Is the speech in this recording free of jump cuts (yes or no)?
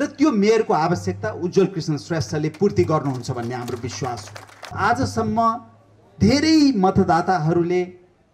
no